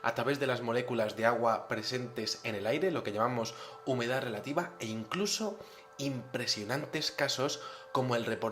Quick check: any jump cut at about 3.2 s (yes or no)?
yes